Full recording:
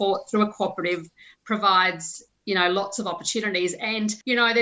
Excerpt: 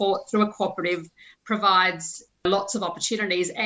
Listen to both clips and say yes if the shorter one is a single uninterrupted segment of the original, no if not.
no